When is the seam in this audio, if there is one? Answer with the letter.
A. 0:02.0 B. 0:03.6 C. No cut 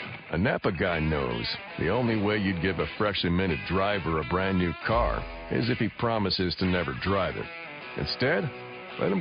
A